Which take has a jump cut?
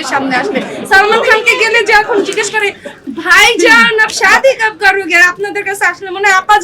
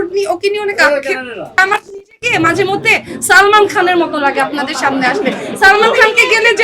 second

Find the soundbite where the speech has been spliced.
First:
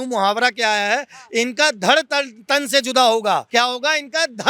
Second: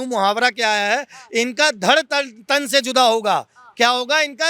first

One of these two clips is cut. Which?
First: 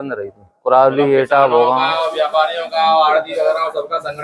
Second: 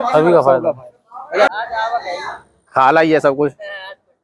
second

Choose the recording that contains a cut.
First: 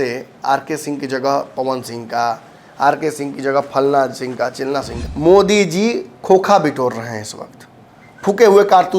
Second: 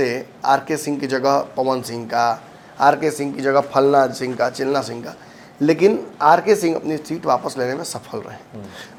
first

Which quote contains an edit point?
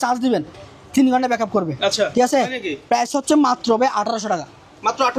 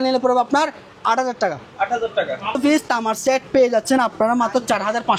second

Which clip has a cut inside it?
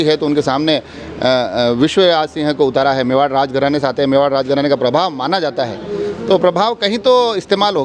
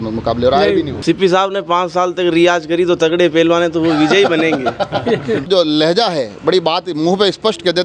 second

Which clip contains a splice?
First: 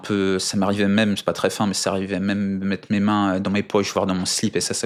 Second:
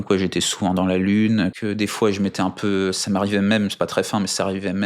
second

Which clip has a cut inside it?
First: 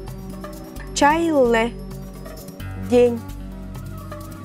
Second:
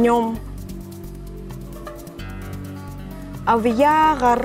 first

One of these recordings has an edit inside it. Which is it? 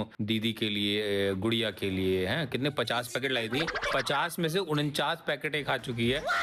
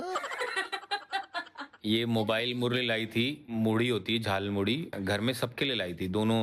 second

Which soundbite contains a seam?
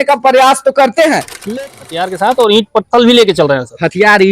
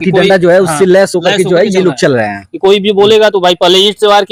first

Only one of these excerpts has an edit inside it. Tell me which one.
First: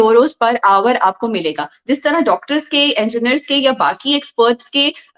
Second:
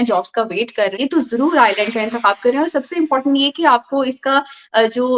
second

